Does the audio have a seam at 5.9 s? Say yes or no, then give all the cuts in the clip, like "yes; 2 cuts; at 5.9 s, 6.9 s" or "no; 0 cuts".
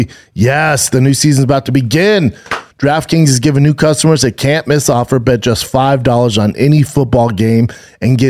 no; 1 cut; at 2.6 s